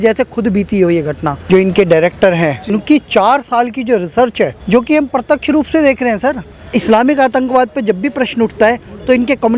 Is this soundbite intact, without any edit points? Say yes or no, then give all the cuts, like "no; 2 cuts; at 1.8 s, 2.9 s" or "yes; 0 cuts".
no; 4 cuts; at 1.3 s, 2.6 s, 4.6 s, 6.7 s